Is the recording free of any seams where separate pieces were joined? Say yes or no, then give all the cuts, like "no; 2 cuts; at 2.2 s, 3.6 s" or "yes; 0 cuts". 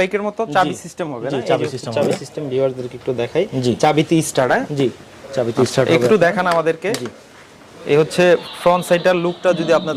yes; 0 cuts